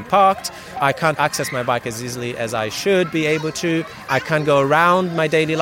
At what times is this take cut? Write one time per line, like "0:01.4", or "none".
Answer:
0:00.9
0:04.0